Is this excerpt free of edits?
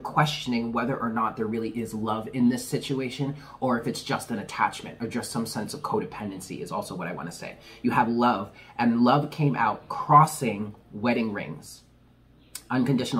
yes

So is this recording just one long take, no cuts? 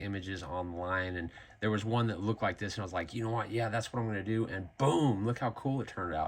yes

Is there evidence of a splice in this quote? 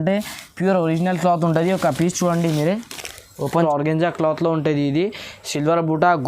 yes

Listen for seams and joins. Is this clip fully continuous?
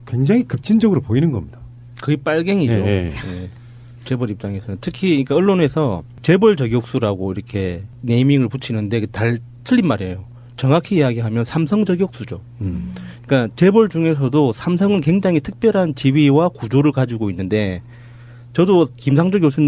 yes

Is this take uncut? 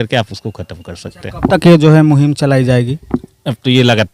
yes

